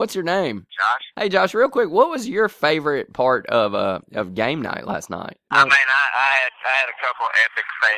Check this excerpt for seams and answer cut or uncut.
cut